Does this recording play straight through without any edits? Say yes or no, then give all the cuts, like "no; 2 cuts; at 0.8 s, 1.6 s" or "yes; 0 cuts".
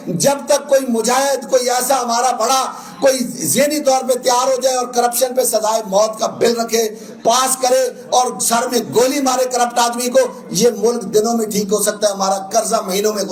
yes; 0 cuts